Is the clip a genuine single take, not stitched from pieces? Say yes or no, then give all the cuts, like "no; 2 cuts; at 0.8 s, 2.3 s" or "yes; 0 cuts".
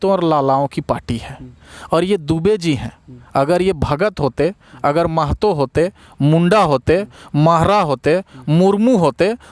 yes; 0 cuts